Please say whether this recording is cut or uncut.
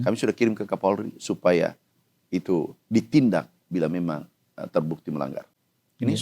uncut